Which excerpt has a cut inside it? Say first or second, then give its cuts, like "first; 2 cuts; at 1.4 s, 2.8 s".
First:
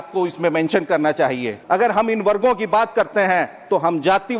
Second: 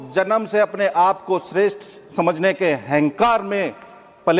first; 1 cut; at 1.5 s